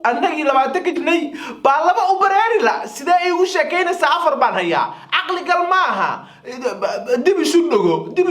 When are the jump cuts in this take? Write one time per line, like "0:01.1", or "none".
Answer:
0:01.0